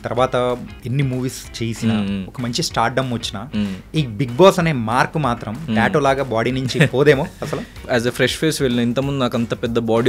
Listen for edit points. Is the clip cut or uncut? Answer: cut